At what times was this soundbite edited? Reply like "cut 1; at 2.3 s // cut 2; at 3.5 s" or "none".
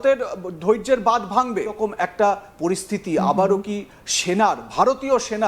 cut 1; at 1.8 s